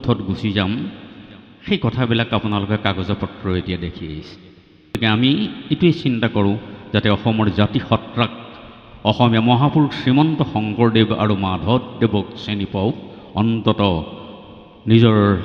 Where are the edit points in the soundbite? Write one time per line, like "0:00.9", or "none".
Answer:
0:05.0